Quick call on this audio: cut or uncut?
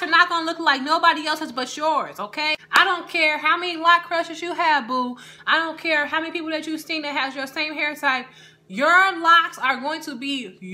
cut